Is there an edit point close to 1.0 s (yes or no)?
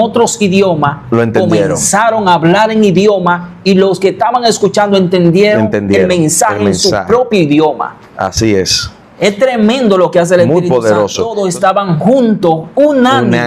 no